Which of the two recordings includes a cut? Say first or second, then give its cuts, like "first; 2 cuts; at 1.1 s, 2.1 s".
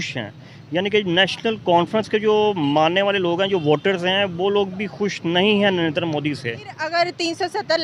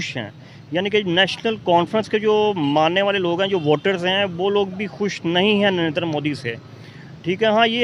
first; 1 cut; at 6.8 s